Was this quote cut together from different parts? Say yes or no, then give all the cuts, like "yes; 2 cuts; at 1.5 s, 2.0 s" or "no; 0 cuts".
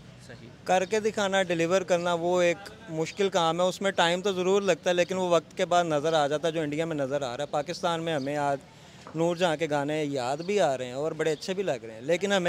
no; 0 cuts